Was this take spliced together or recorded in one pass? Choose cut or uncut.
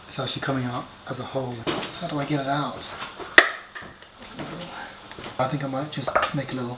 cut